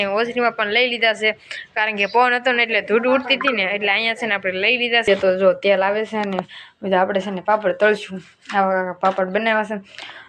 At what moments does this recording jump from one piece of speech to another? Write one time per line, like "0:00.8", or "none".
0:05.1